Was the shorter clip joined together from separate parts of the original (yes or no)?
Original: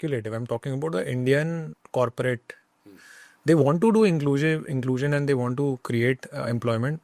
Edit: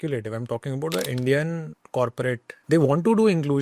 yes